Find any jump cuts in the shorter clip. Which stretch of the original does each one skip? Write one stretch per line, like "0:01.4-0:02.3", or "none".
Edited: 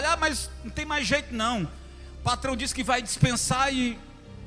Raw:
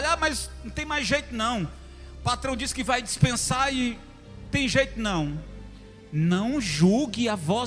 none